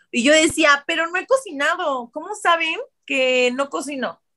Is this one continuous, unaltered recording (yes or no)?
yes